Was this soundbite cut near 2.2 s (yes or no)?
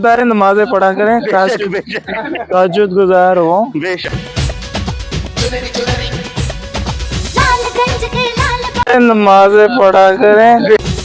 no